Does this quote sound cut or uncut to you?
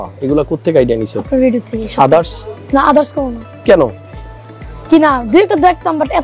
uncut